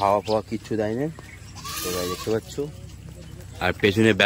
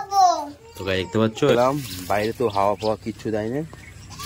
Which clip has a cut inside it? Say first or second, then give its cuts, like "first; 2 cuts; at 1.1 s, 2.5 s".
second; 1 cut; at 1.5 s